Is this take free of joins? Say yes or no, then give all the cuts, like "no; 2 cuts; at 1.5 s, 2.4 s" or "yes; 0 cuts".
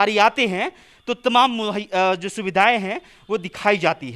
yes; 0 cuts